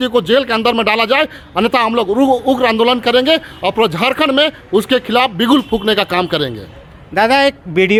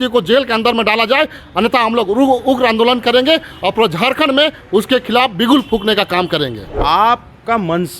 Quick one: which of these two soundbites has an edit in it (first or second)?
second